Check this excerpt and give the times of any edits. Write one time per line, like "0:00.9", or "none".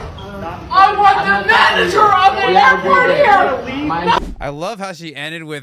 0:04.3